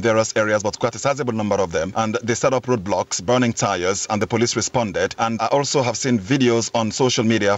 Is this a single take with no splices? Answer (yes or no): no